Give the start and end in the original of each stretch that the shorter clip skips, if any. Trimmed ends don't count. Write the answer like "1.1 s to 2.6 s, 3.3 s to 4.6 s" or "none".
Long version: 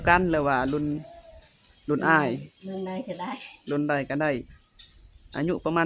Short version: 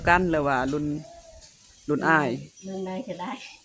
none